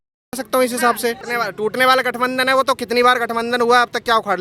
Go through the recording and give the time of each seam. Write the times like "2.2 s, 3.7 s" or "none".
1.2 s